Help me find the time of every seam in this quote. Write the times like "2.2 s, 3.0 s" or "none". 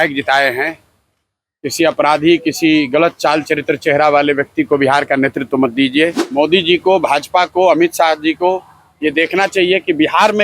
6.2 s